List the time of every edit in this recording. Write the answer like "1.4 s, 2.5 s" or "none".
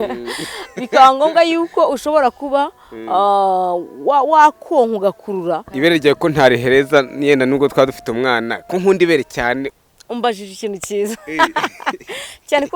5.7 s, 9.7 s